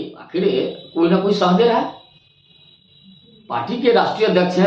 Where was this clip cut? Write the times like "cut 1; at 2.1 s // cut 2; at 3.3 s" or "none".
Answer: none